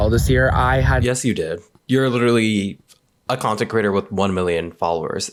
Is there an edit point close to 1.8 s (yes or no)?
no